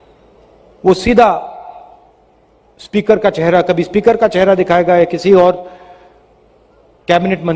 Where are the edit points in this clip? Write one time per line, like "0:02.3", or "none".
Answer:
none

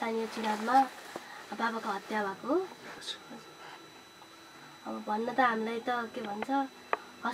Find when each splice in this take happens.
0:02.9

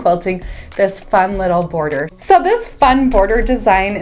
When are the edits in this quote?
0:02.1

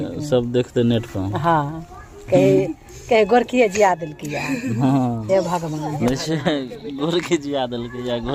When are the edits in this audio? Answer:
none

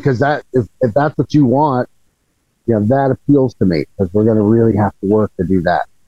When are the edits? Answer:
none

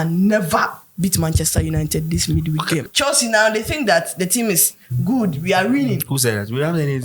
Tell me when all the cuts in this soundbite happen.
0:02.8

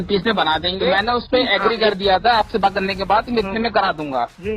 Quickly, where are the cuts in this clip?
0:01.0

